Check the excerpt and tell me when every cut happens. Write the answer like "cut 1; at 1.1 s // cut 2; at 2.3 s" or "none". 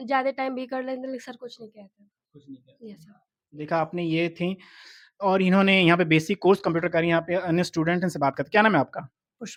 none